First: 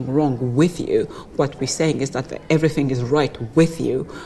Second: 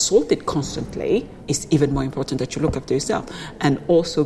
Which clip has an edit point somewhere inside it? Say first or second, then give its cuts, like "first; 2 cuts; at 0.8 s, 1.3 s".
second; 1 cut; at 1.4 s